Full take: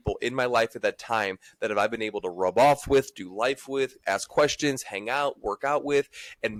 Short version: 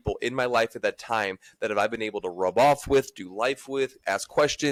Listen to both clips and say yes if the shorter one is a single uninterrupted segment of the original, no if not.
yes